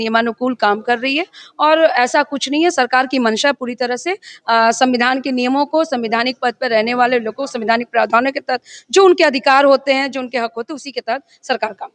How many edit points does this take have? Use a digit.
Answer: 0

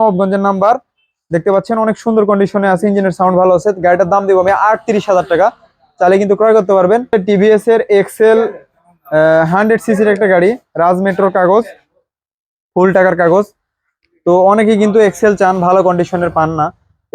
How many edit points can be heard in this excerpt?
1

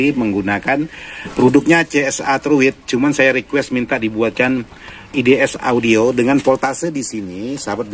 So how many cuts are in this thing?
1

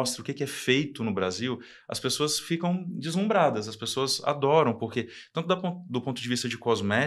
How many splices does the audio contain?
0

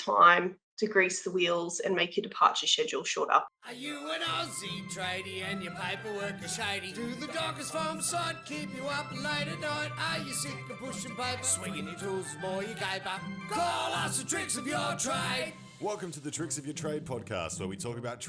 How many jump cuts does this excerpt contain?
1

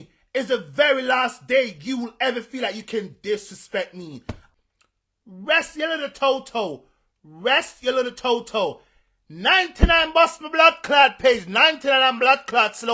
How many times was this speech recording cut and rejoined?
1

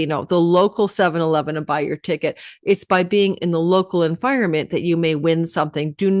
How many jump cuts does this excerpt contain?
0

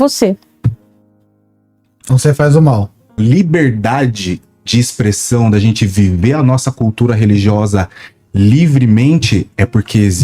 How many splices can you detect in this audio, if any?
1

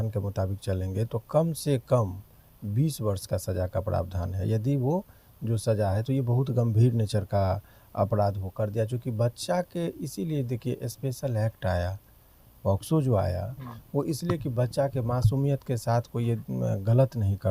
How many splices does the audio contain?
0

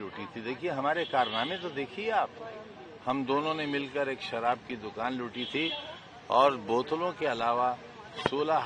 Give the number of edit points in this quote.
0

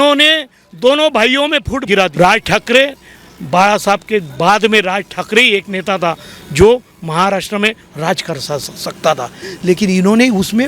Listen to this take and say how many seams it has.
1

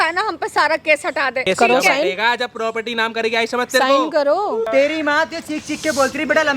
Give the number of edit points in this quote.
2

